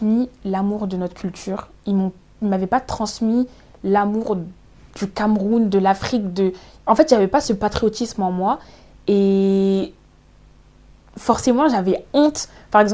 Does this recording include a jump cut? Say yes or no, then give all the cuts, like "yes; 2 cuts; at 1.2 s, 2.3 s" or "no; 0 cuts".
no; 0 cuts